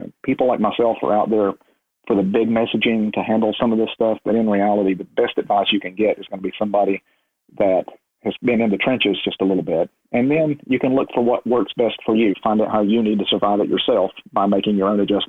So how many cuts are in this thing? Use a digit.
1